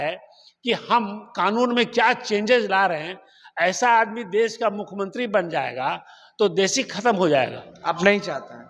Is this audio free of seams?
yes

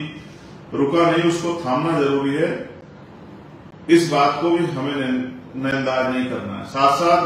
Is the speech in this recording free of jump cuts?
yes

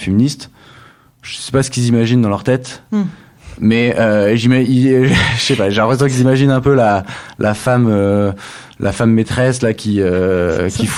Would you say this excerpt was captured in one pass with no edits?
yes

